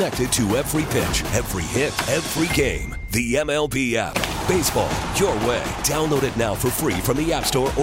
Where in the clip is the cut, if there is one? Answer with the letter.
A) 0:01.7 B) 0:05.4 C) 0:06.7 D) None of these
D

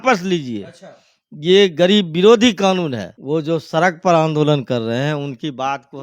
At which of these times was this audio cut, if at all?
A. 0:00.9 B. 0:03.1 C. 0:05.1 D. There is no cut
B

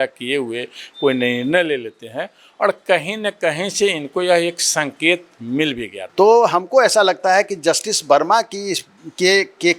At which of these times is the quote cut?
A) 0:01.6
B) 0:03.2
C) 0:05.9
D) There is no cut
C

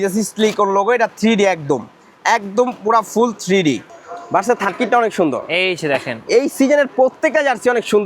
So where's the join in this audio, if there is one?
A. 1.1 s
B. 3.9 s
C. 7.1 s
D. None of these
B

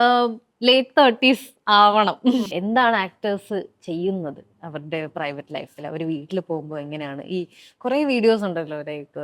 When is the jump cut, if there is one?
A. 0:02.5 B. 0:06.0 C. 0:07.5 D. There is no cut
A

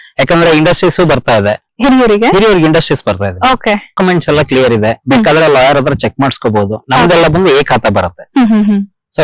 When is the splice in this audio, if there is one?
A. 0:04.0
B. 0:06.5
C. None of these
A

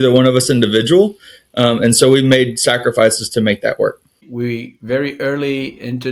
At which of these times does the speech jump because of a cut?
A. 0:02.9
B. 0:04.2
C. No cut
B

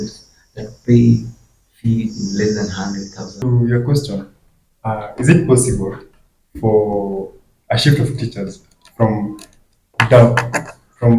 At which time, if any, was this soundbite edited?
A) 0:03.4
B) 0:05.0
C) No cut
A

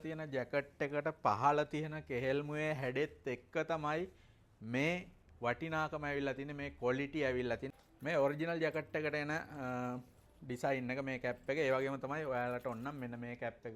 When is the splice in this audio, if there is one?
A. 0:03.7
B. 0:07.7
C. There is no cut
B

